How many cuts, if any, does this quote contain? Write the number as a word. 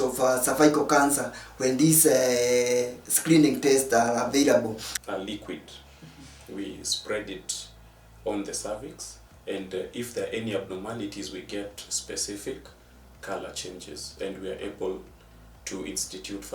one